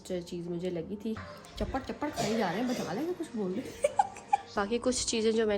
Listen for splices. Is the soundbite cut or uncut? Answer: cut